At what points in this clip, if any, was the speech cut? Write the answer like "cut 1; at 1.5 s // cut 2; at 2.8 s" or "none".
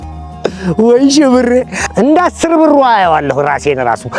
cut 1; at 1.8 s